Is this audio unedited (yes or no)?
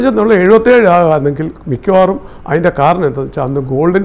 yes